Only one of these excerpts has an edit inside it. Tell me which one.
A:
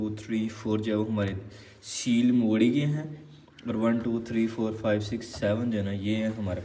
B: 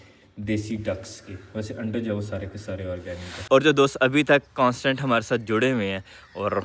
B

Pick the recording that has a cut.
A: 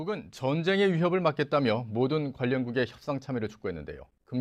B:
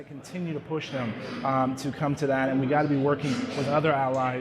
B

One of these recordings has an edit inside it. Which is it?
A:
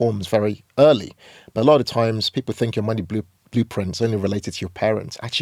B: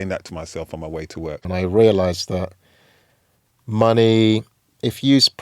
B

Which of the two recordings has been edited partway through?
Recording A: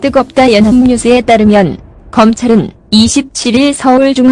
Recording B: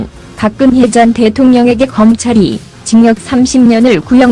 A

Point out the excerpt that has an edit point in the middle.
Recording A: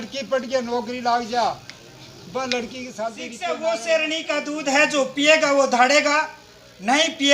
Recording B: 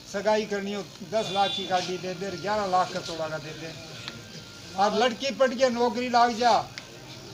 A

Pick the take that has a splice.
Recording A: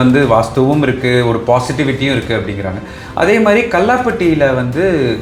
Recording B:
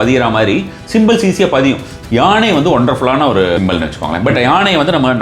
B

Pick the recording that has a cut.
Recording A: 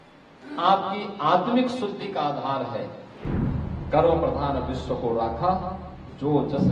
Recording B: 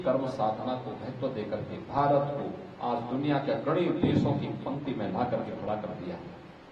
A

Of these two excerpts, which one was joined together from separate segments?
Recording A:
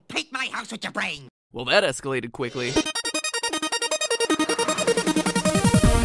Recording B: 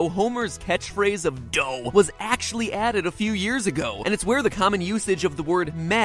B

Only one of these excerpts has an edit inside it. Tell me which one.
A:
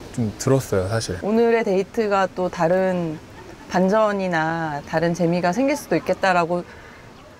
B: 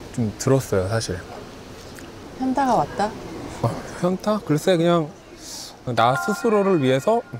A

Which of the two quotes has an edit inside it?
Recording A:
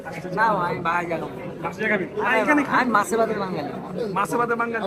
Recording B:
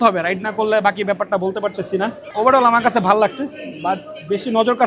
B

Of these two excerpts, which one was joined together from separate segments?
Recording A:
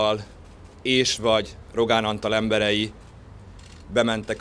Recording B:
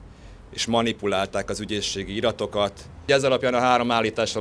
B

